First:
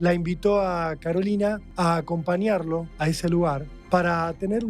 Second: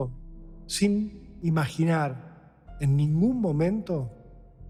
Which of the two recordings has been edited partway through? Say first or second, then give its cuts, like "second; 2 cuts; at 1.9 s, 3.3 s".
first; 3 cuts; at 1.7 s, 2.9 s, 3.7 s